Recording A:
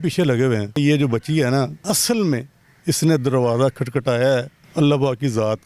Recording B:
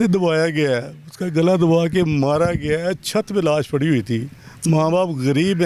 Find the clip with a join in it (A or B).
A